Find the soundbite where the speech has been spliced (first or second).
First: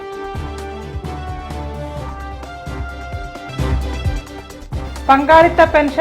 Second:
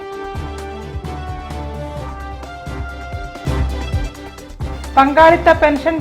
second